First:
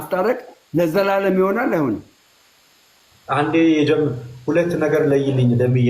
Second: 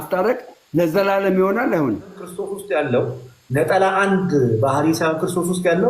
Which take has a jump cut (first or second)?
second